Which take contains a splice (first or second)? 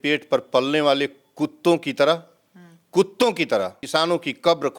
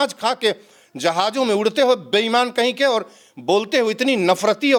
first